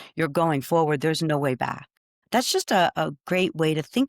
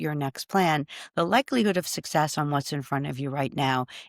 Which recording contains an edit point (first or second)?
first